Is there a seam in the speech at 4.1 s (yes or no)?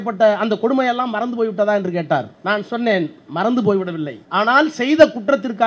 yes